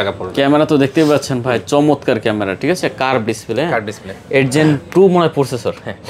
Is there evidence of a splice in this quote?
no; 0 cuts

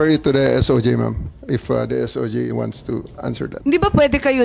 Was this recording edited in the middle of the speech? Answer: yes; 1 cut; at 3.5 s

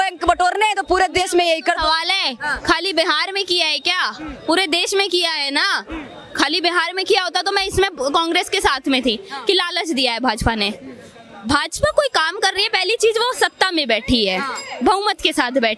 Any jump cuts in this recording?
no; 0 cuts

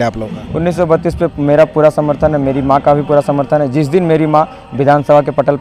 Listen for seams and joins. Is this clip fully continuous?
yes; 0 cuts

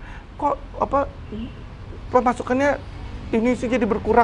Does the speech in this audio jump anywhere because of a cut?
no; 0 cuts

